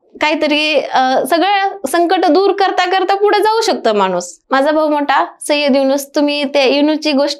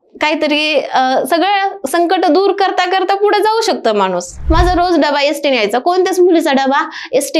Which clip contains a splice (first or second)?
second